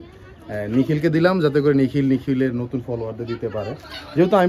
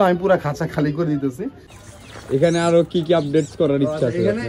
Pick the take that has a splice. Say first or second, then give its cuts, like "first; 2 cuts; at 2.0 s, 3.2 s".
second; 1 cut; at 1.6 s